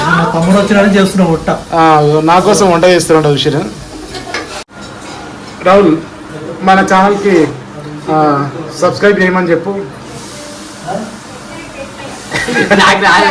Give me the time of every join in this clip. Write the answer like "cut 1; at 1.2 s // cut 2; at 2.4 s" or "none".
cut 1; at 4.7 s